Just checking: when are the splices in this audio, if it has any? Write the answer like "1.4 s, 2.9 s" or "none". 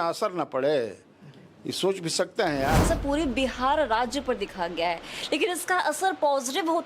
2.8 s